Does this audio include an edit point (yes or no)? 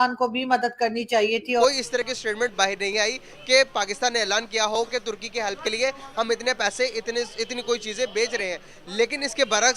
yes